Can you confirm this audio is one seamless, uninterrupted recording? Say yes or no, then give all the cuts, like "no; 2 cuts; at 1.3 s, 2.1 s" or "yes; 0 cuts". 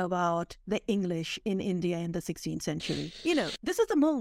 no; 1 cut; at 3.1 s